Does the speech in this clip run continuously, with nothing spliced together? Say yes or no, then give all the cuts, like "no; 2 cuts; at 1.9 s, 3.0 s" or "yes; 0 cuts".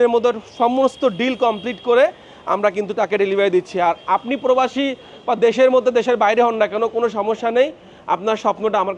yes; 0 cuts